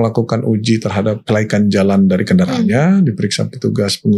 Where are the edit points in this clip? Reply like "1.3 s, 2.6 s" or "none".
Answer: 1.2 s